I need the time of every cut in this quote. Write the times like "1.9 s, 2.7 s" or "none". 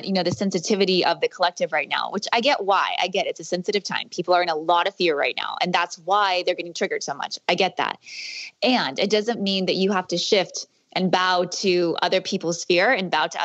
none